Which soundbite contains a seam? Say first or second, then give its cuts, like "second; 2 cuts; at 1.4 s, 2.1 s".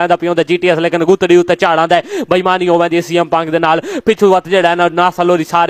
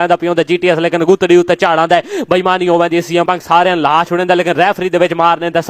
second; 1 cut; at 3.3 s